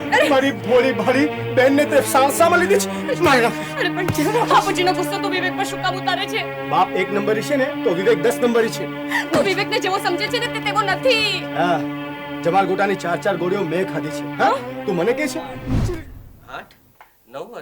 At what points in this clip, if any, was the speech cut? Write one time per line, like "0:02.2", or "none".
0:16.0